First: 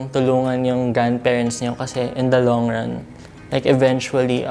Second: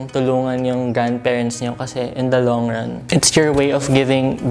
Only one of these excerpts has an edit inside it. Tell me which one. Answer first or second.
second